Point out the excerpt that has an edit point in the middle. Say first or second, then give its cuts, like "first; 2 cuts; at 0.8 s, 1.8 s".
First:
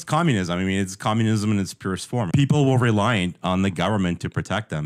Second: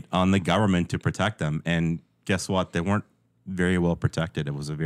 first; 1 cut; at 2.3 s